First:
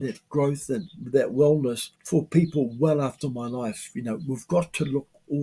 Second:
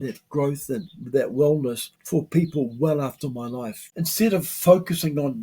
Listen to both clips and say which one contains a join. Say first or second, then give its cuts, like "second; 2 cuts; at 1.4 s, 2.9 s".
second; 1 cut; at 3.9 s